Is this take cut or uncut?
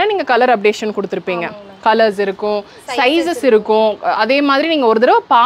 uncut